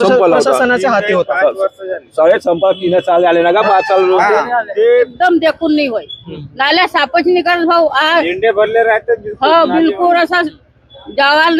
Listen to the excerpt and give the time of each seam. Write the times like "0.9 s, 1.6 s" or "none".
5.1 s